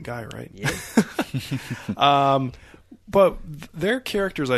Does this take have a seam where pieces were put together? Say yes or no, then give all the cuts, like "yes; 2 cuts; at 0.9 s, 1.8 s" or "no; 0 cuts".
no; 0 cuts